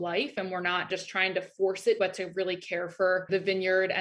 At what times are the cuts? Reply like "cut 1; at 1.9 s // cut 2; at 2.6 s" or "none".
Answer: cut 1; at 0.9 s // cut 2; at 2.0 s // cut 3; at 3.3 s